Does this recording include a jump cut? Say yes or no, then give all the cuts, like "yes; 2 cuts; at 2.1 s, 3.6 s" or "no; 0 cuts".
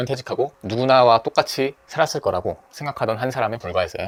no; 0 cuts